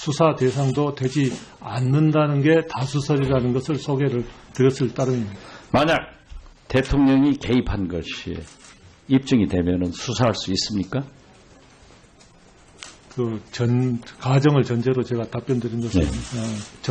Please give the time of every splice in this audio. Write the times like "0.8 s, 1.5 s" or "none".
6.1 s